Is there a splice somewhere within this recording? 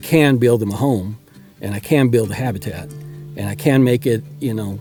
no; 0 cuts

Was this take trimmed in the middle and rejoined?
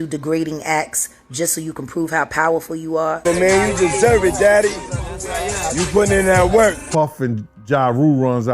yes; 2 cuts; at 3.2 s, 6.8 s

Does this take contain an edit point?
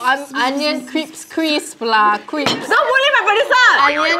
yes; 1 cut; at 2.6 s

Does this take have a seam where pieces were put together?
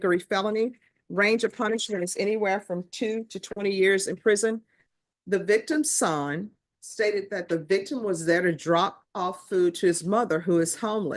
yes; 1 cut; at 4.7 s

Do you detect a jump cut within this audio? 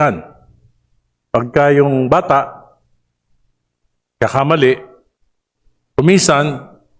no; 0 cuts

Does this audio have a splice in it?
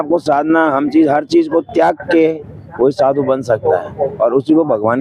no; 0 cuts

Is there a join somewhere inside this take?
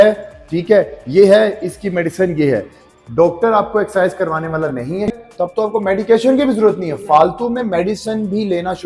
yes; 1 cut; at 5.2 s

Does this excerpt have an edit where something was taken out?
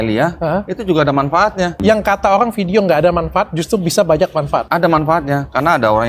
yes; 2 cuts; at 1.8 s, 4.7 s

